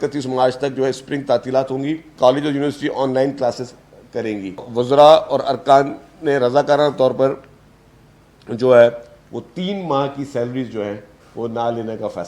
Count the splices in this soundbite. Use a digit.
2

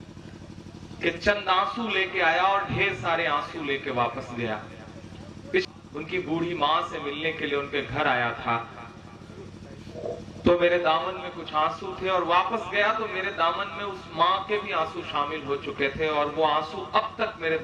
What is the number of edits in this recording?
1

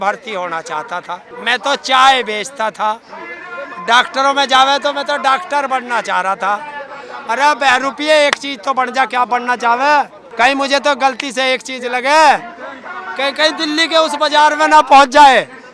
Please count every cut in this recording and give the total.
2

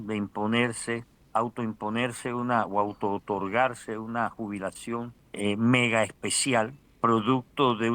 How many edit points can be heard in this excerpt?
3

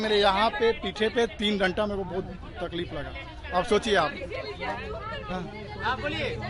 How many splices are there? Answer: 0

